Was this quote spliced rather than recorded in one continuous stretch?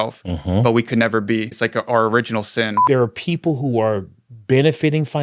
yes; 2 cuts; at 1.5 s, 2.8 s

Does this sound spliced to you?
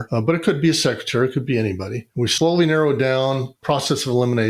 yes; 2 cuts; at 2.3 s, 3.6 s

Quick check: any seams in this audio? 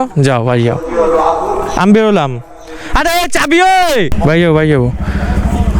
yes; 1 cut; at 4.1 s

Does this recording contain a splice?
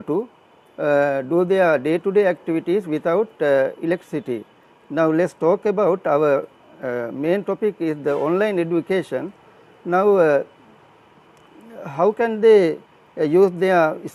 no; 0 cuts

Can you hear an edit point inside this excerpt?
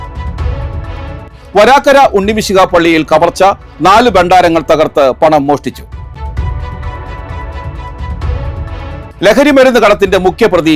no; 0 cuts

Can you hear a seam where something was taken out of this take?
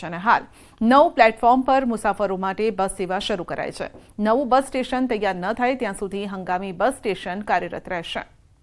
yes; 1 cut; at 7.4 s

